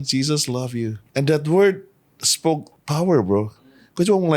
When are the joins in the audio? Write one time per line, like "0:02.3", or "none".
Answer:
0:01.0
0:02.8

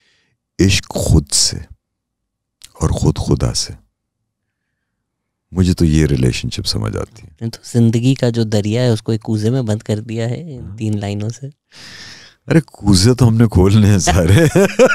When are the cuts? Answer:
none

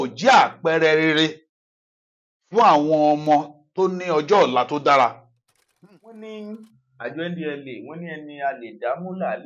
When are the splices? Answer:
0:05.8

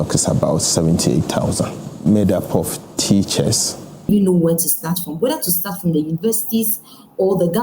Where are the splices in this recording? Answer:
0:04.1

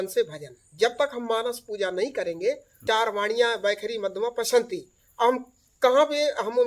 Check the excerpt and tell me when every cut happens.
0:02.8

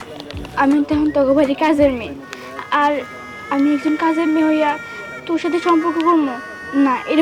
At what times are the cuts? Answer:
none

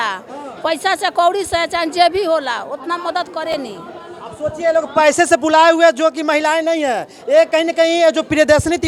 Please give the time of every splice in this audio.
none

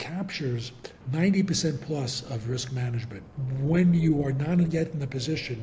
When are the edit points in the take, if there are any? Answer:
0:01.0
0:03.3

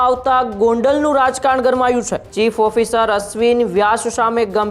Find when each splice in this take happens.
0:02.2

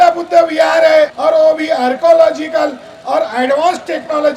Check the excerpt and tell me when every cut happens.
0:01.2

